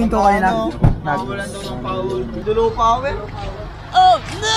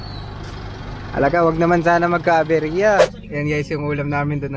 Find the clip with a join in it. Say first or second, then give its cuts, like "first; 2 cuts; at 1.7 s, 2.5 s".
second; 1 cut; at 3.2 s